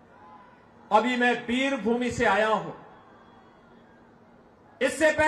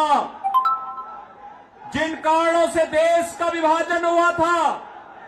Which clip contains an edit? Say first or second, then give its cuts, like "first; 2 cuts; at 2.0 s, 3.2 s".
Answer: second; 1 cut; at 4.2 s